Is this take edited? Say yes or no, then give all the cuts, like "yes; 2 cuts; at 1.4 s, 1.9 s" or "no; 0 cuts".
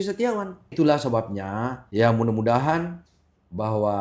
yes; 2 cuts; at 0.7 s, 1.8 s